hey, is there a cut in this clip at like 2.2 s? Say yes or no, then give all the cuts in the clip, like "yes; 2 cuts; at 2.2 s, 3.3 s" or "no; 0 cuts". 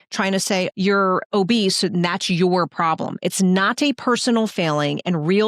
no; 0 cuts